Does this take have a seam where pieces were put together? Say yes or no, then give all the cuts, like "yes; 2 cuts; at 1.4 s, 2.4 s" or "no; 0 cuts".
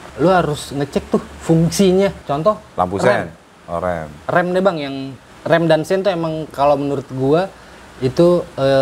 no; 0 cuts